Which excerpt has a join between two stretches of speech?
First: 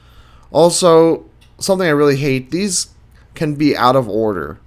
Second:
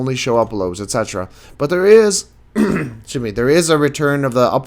first; 1 cut; at 1.4 s

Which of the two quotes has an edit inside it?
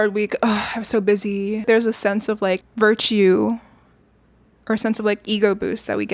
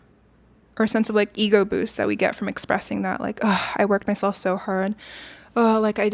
first; 2 cuts; at 1.6 s, 2.7 s

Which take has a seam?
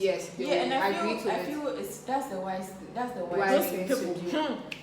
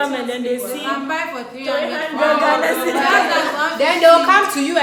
first; 1 cut; at 3.5 s

